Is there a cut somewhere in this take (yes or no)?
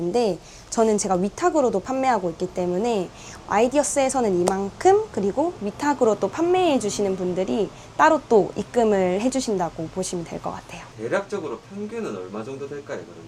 no